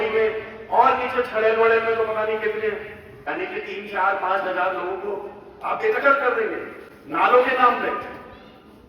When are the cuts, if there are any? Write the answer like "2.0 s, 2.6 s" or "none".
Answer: 3.2 s